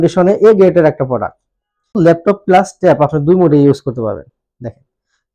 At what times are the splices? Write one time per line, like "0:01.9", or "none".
0:02.0